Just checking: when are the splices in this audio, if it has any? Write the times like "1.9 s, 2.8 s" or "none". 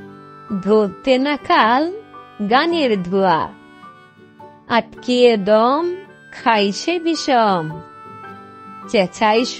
none